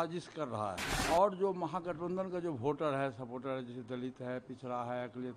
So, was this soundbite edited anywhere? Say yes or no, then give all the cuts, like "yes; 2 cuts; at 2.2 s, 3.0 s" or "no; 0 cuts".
yes; 1 cut; at 0.9 s